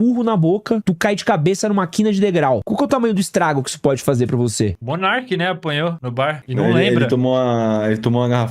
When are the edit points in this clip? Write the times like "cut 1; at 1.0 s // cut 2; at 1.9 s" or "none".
cut 1; at 0.8 s // cut 2; at 2.7 s // cut 3; at 4.8 s // cut 4; at 6.3 s